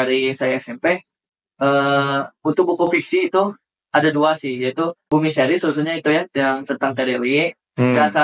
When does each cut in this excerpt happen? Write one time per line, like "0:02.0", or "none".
0:05.0